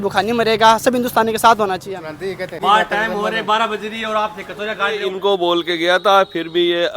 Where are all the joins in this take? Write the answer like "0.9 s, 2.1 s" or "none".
2.6 s, 5.0 s